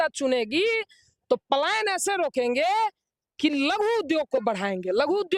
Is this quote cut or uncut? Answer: uncut